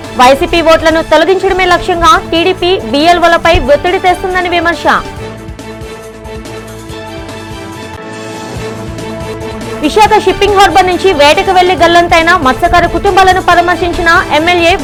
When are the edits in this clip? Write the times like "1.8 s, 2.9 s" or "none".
none